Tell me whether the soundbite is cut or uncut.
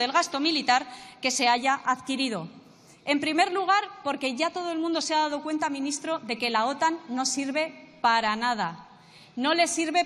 uncut